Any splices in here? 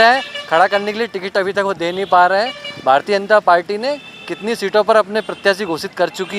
no; 0 cuts

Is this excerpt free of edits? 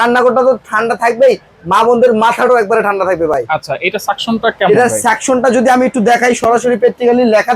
yes; 0 cuts

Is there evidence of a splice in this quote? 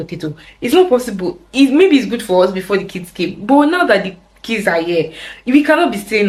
no; 0 cuts

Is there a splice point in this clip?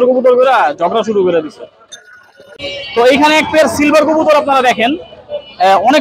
yes; 1 cut; at 2.5 s

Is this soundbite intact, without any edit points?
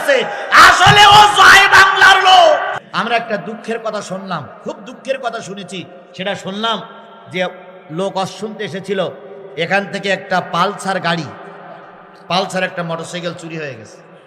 no; 1 cut; at 2.8 s

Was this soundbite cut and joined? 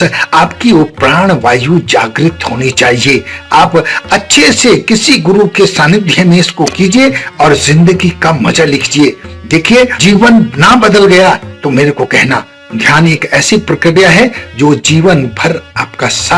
no; 0 cuts

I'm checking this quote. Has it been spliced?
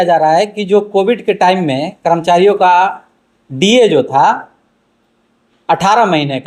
no; 0 cuts

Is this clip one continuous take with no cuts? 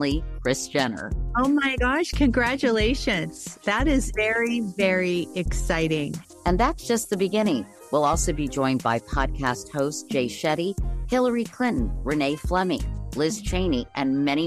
yes; 0 cuts

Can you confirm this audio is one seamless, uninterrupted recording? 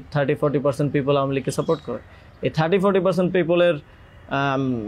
yes; 0 cuts

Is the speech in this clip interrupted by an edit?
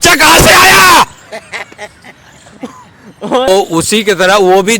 yes; 1 cut; at 3.5 s

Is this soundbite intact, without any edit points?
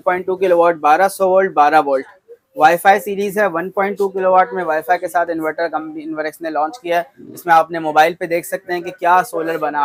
yes; 0 cuts

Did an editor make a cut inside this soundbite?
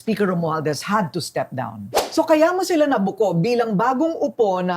yes; 1 cut; at 1.9 s

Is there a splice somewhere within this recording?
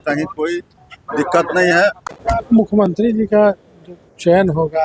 yes; 1 cut; at 2.1 s

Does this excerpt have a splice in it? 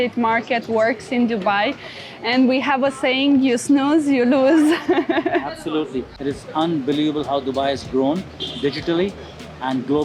yes; 1 cut; at 6.1 s

